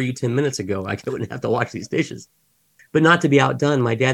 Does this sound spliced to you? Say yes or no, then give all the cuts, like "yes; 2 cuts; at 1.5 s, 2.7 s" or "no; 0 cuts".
yes; 1 cut; at 2.7 s